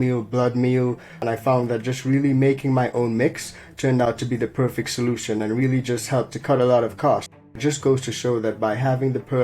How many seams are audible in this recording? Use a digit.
2